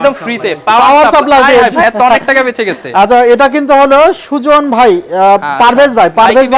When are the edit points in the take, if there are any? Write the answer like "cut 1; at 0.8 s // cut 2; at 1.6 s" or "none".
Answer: none